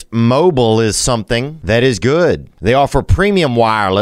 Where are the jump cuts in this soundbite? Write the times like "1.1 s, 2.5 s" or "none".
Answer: 1.5 s, 2.5 s